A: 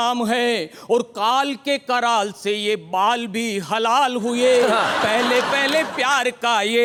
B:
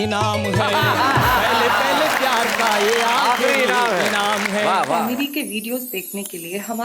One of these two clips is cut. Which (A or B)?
B